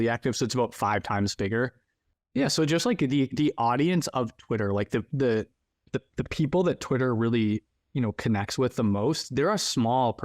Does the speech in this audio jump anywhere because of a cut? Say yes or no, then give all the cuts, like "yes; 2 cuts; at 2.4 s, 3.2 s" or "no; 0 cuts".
yes; 1 cut; at 2.3 s